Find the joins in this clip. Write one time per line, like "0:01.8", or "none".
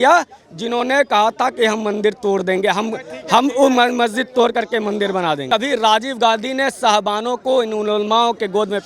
0:05.4